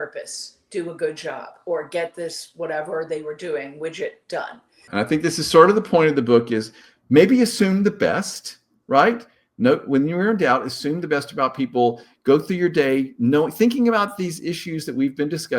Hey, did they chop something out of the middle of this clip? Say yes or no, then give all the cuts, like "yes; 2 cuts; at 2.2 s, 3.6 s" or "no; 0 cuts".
yes; 1 cut; at 4.9 s